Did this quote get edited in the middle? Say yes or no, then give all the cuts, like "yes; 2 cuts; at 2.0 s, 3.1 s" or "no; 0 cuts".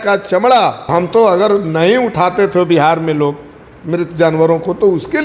yes; 1 cut; at 0.9 s